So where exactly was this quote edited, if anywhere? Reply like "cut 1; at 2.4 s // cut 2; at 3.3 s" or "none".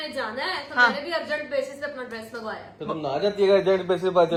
none